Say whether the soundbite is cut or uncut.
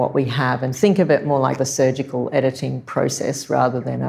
cut